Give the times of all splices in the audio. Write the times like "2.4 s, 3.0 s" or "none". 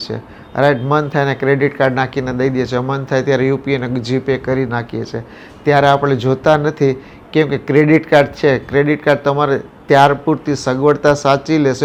none